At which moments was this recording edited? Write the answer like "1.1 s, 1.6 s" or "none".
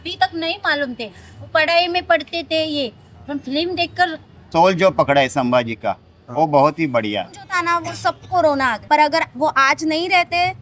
4.4 s, 7.4 s, 8.8 s

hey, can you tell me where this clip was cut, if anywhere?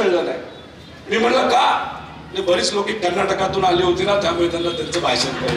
none

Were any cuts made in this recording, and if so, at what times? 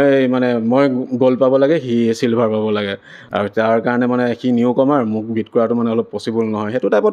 none

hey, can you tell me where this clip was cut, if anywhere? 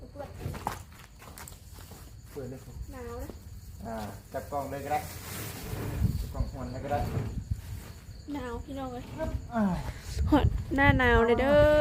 none

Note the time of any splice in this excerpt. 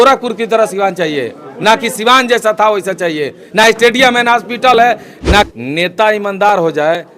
5.5 s

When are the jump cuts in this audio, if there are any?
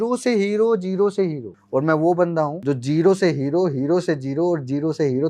1.5 s, 2.6 s

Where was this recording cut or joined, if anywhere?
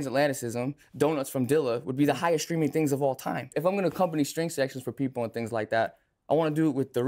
3.6 s

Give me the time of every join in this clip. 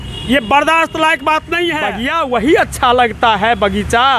2.0 s

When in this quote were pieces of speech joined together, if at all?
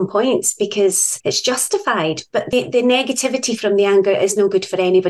1.1 s, 2.5 s

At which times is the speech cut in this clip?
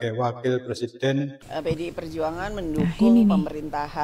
1.4 s

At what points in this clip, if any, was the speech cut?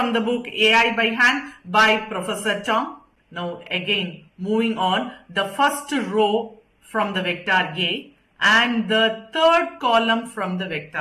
3.0 s

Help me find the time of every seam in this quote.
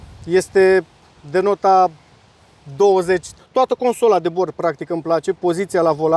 3.3 s

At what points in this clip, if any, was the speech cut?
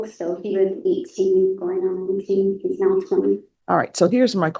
3.5 s

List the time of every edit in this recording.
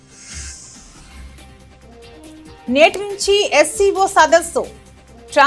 2.7 s

